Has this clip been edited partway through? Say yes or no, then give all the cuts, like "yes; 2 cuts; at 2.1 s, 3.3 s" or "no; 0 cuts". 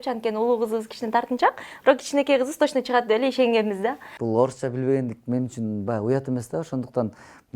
yes; 1 cut; at 4.1 s